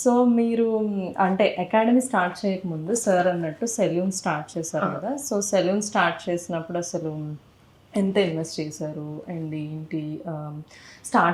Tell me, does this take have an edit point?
no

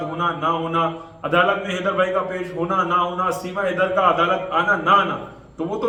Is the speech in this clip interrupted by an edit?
no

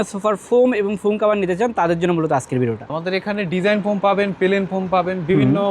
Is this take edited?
yes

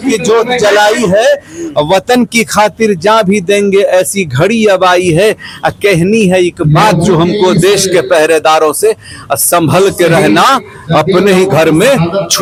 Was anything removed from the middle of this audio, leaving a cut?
no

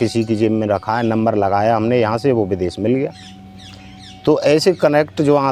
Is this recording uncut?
yes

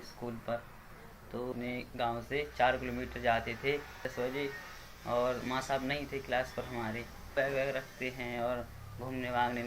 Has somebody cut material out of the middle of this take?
yes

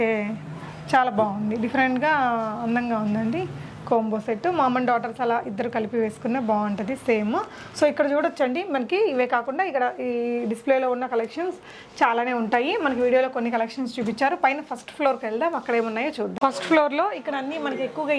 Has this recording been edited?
no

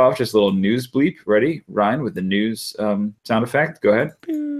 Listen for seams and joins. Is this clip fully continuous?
yes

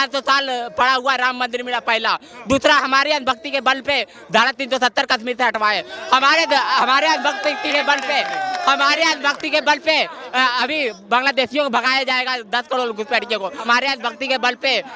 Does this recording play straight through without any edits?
no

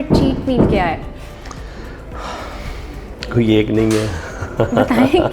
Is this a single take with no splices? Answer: yes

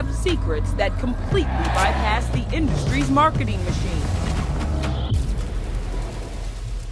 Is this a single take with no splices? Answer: no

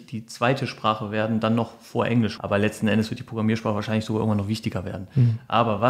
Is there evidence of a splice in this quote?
yes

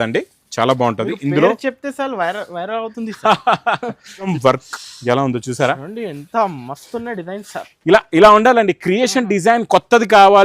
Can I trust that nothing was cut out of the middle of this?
no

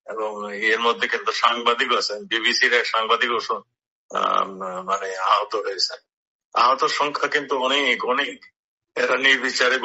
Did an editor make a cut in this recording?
no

